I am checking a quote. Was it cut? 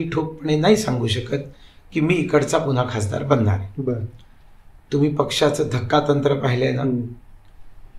no; 0 cuts

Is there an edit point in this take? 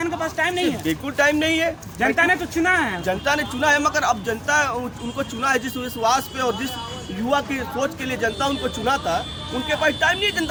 no; 0 cuts

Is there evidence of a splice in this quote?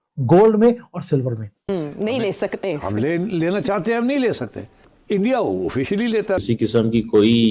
yes; 2 cuts; at 1.5 s, 6.4 s

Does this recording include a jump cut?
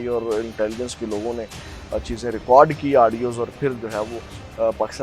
no; 0 cuts

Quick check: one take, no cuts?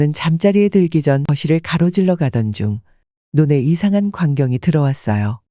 no; 1 cut; at 1.3 s

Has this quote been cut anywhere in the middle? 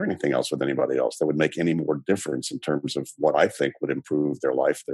no; 0 cuts

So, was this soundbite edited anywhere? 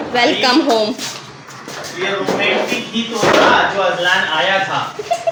no; 0 cuts

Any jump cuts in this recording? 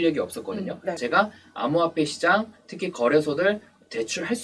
yes; 1 cut; at 1.0 s

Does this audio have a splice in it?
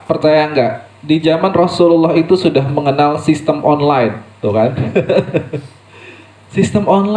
yes; 1 cut; at 4.3 s

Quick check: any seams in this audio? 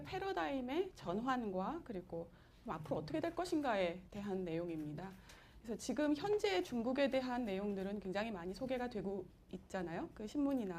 yes; 1 cut; at 7.8 s

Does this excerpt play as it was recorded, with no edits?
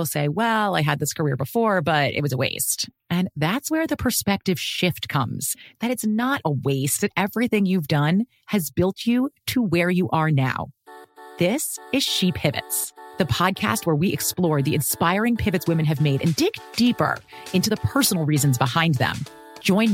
yes; 0 cuts

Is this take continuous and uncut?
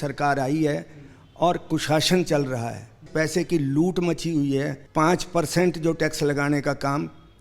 no; 2 cuts; at 3.1 s, 4.8 s

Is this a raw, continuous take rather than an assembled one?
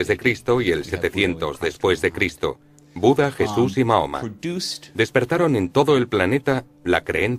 no; 1 cut; at 2.0 s

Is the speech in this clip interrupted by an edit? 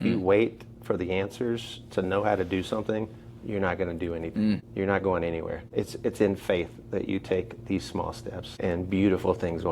yes; 3 cuts; at 4.7 s, 5.6 s, 8.5 s

